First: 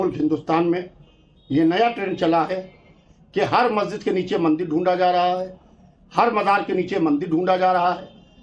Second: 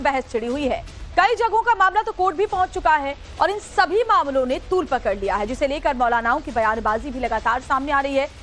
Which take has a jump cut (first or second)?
second